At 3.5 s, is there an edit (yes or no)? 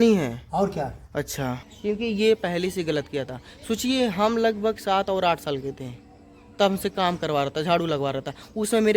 no